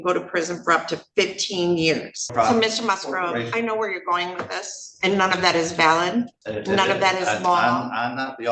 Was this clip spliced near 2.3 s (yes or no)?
yes